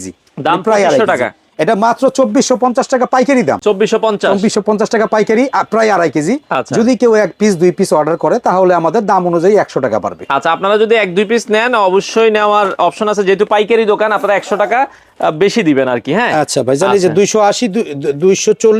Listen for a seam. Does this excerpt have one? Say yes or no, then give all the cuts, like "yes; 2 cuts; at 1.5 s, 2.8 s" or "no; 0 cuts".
no; 0 cuts